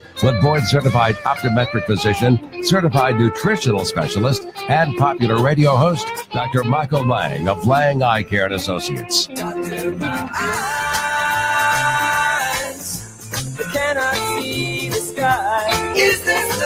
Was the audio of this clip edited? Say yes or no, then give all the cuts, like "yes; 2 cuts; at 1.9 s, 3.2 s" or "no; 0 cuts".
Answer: yes; 1 cut; at 14.7 s